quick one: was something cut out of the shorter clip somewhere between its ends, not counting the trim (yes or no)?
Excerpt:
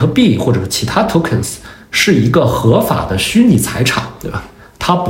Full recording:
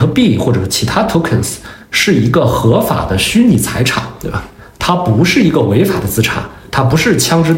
no